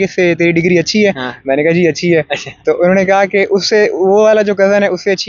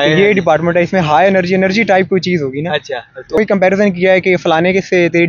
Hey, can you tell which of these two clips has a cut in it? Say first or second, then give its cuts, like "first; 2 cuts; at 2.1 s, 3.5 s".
second; 1 cut; at 3.4 s